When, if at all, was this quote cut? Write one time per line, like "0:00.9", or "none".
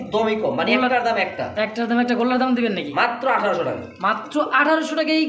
none